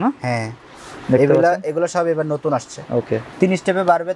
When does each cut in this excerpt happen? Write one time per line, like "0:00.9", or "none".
0:03.2